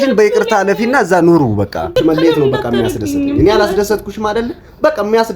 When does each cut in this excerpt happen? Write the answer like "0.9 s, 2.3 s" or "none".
1.9 s